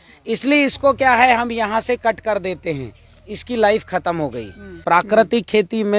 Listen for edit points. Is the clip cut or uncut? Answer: cut